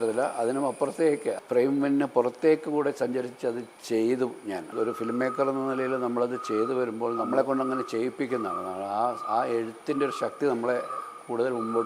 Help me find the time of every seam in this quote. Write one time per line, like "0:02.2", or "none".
0:01.3
0:03.8
0:04.7
0:07.3